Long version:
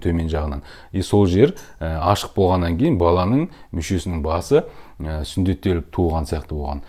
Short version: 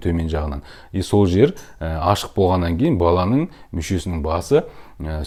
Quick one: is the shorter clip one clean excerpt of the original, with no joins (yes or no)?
yes